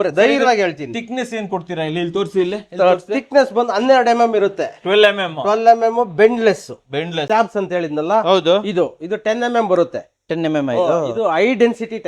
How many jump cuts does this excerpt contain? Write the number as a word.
one